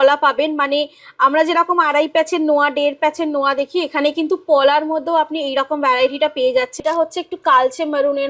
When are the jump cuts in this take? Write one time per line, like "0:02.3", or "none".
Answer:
0:06.8